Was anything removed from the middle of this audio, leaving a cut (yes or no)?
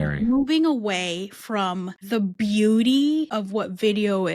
yes